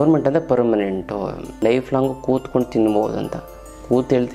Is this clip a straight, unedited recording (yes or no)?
no